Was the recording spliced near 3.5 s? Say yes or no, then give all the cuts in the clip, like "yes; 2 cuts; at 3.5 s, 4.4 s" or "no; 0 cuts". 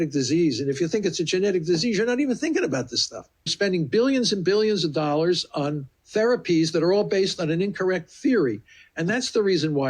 yes; 1 cut; at 3.5 s